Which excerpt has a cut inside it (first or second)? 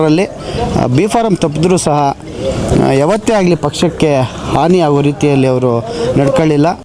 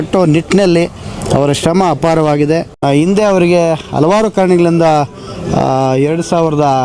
second